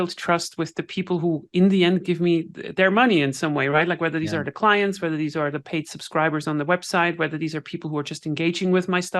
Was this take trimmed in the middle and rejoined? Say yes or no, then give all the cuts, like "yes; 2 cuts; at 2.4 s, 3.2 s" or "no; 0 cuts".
no; 0 cuts